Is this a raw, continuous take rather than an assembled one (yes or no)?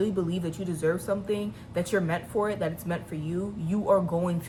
yes